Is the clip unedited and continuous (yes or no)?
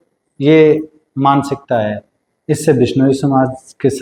yes